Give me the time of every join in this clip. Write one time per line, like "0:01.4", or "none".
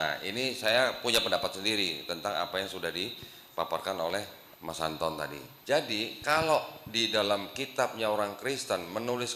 0:05.5

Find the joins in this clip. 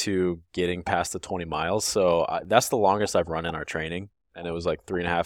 none

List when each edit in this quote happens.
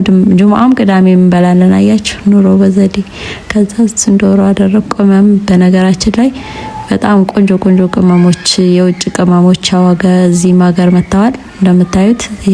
none

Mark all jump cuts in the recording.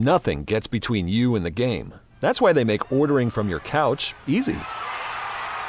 none

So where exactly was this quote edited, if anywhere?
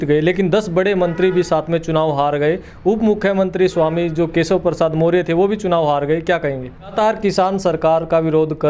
0:06.9

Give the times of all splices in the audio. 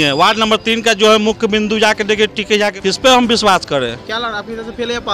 0:02.8

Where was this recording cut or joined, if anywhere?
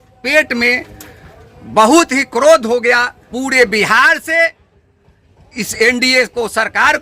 0:03.3

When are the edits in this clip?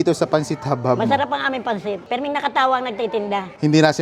none

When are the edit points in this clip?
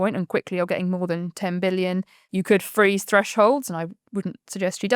0:02.2

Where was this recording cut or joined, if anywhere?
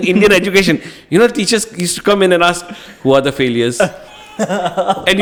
none

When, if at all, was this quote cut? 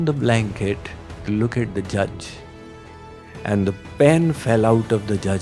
none

